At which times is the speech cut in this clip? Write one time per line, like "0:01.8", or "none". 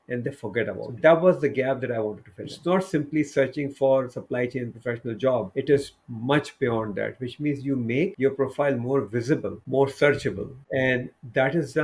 0:00.8
0:02.5
0:05.5
0:08.1
0:09.6
0:10.5